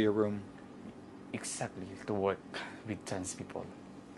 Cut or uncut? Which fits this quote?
uncut